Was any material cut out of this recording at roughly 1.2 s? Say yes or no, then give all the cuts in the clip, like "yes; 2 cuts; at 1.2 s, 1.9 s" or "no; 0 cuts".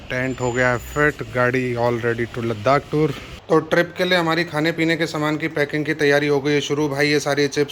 no; 0 cuts